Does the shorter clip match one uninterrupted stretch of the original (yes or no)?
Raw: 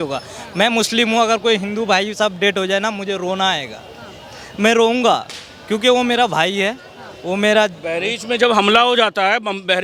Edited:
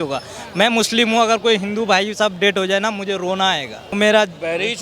no